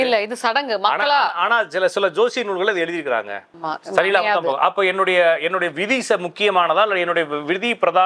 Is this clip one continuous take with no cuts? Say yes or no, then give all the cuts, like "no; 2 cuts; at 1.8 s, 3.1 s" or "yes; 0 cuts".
no; 1 cut; at 3.7 s